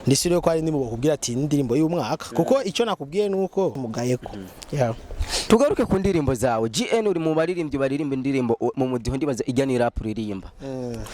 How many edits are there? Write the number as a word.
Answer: one